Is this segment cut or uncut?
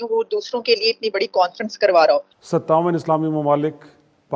cut